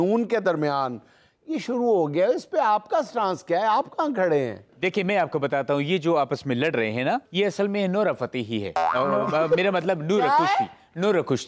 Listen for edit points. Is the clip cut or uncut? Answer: cut